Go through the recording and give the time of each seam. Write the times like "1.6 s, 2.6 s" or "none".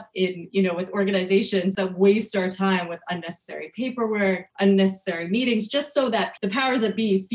1.8 s, 4.5 s, 6.3 s